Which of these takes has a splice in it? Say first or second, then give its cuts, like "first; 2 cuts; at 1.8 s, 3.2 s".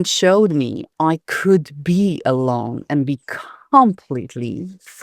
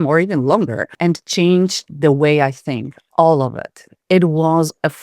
second; 1 cut; at 0.9 s